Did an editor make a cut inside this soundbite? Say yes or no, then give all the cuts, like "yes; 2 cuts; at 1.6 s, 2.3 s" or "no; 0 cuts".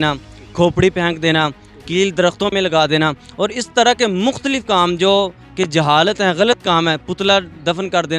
no; 0 cuts